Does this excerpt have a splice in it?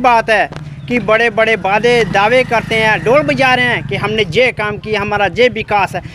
no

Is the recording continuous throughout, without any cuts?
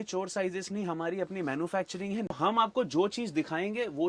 no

